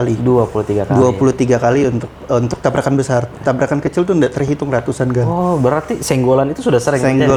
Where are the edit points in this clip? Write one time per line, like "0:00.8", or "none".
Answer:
none